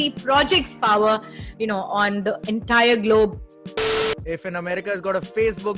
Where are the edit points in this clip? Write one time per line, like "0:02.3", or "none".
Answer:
0:04.0